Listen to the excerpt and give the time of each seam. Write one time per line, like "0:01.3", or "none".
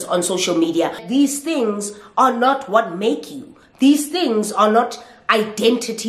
0:01.0